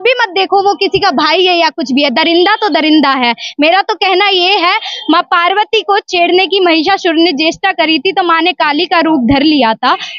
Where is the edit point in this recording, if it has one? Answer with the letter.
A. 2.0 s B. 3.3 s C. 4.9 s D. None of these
D